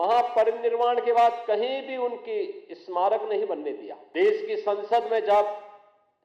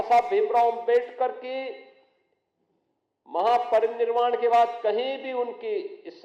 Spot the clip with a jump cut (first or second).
first